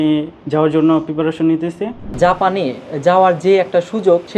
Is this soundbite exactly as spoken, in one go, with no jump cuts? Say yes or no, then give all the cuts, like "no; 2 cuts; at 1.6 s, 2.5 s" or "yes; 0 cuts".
no; 1 cut; at 2.0 s